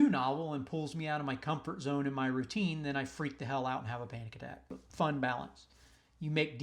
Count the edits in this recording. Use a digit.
1